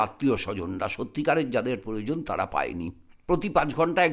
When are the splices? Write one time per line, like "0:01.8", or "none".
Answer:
0:03.1